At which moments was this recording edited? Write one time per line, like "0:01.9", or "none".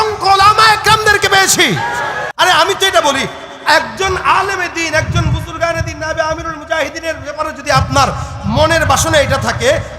0:02.2